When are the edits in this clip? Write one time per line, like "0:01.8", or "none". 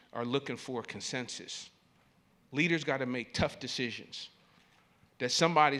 none

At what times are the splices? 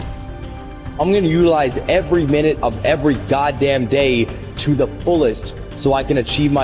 0:01.0

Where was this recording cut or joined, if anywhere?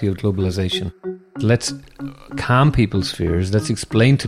0:01.2

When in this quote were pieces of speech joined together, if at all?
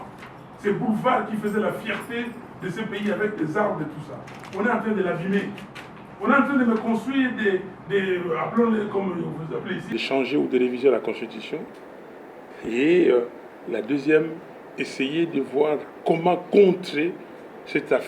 0:09.8

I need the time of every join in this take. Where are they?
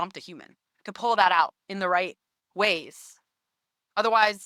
none

